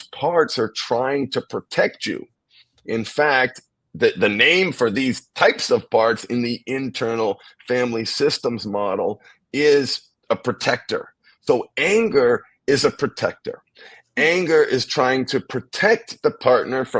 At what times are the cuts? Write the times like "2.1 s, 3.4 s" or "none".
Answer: none